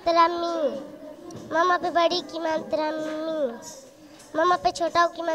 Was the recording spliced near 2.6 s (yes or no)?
no